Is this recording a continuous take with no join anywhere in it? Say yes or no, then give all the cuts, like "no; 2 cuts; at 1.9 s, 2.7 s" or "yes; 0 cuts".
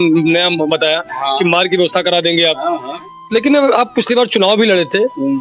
yes; 0 cuts